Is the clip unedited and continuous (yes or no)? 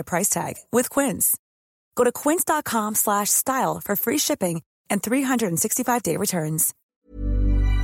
no